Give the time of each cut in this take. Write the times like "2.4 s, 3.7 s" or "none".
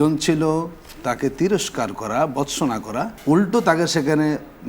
3.1 s